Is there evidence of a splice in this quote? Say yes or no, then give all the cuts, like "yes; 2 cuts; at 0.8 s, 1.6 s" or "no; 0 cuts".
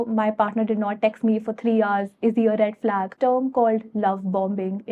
yes; 1 cut; at 3.1 s